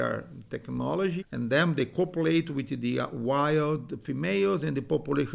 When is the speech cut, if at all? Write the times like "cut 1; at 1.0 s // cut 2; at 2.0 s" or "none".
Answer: cut 1; at 1.2 s